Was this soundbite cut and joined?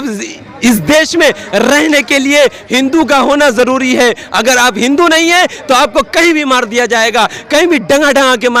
no; 0 cuts

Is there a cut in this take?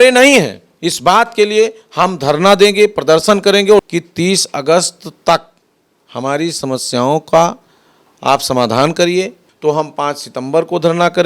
yes; 2 cuts; at 3.9 s, 9.4 s

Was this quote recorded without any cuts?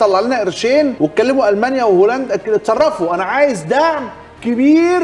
no; 1 cut; at 0.9 s

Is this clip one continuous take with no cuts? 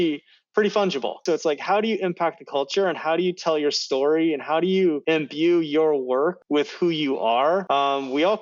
no; 4 cuts; at 1.2 s, 5.0 s, 6.4 s, 7.6 s

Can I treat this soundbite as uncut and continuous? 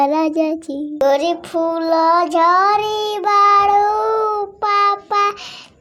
no; 1 cut; at 1.0 s

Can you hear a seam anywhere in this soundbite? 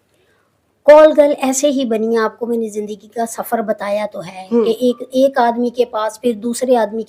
no; 0 cuts

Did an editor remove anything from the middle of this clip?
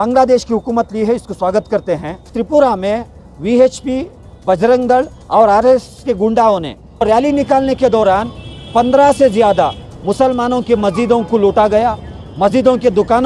yes; 2 cuts; at 2.4 s, 7.0 s

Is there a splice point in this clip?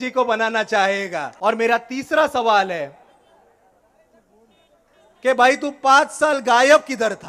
yes; 1 cut; at 1.3 s

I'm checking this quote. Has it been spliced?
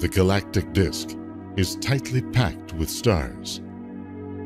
yes; 1 cut; at 1.8 s

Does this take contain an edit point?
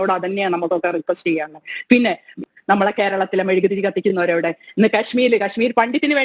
yes; 1 cut; at 2.4 s

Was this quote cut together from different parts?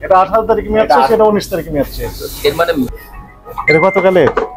yes; 1 cut; at 2.9 s

